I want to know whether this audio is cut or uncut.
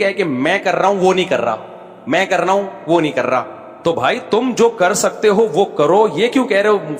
cut